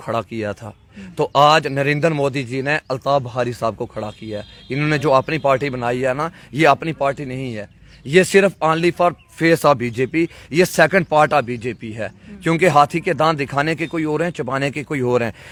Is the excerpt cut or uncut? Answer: uncut